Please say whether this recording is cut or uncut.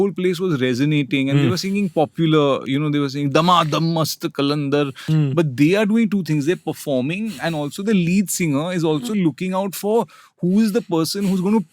cut